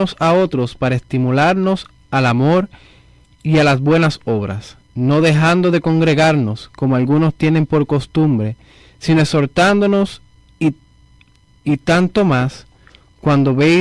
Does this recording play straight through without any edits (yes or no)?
yes